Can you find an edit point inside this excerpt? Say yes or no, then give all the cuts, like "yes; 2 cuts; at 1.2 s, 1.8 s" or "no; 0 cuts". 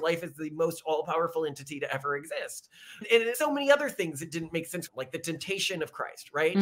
yes; 1 cut; at 4.9 s